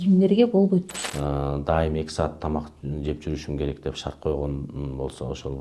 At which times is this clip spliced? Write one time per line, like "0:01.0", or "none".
0:01.0

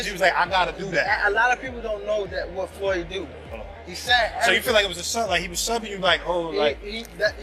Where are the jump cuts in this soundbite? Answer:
none

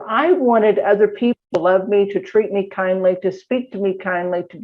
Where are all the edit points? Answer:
0:01.4

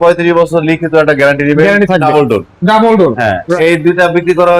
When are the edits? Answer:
0:02.0
0:03.5

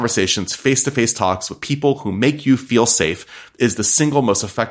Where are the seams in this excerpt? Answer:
none

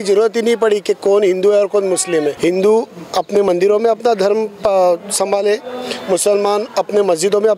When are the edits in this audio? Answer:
0:02.4

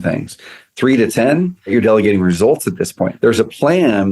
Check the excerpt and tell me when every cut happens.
0:01.7
0:03.1

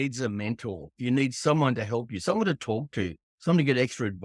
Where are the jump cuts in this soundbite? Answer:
0:00.9

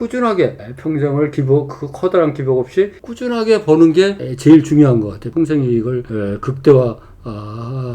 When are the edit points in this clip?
0:05.2

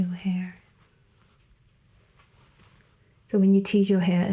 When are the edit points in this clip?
0:01.4

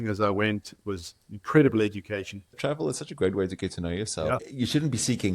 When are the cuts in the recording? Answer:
0:02.6
0:04.4

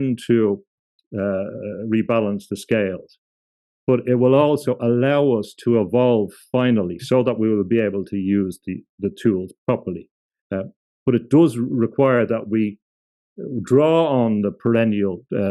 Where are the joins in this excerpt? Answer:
0:00.9

